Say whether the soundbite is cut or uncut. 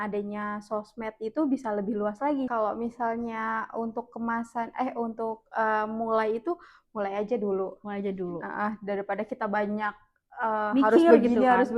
cut